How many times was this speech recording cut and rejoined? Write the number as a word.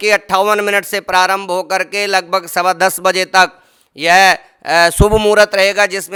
zero